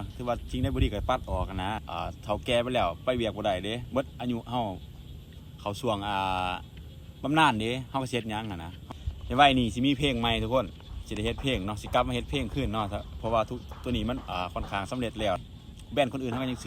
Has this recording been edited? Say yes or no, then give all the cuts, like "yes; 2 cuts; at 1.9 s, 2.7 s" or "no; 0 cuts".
yes; 3 cuts; at 1.9 s, 8.7 s, 15.4 s